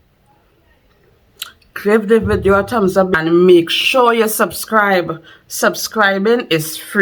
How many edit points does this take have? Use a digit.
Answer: 1